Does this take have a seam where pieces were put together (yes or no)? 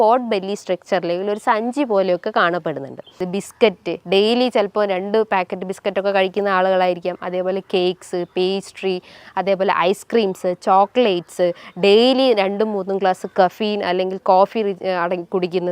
yes